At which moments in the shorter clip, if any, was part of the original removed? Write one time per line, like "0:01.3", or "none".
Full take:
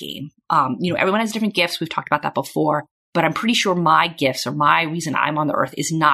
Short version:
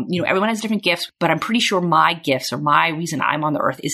0:01.1